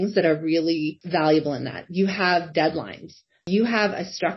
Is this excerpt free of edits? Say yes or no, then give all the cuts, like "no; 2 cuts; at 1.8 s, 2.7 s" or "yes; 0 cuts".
no; 2 cuts; at 1.0 s, 3.4 s